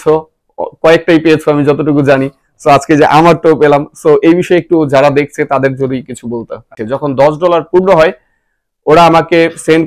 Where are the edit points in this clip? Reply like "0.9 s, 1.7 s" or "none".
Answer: 6.8 s